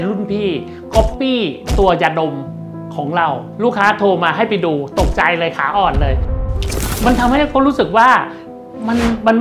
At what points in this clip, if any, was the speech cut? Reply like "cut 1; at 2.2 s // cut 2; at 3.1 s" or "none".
cut 1; at 3.5 s // cut 2; at 6.5 s